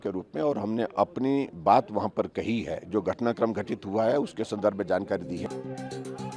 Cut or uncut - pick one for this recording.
cut